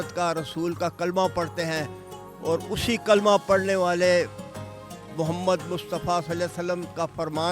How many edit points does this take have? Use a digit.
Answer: 0